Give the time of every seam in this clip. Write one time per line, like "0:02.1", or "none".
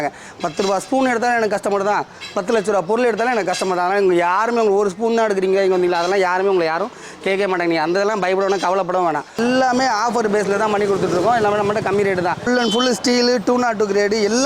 0:09.4
0:12.5